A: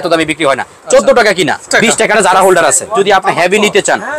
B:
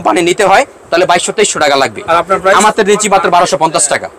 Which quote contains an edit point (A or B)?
A